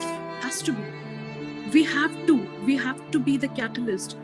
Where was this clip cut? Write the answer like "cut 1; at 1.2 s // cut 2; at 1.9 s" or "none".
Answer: none